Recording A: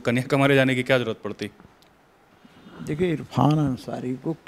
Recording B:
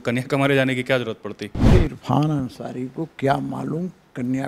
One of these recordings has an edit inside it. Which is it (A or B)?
B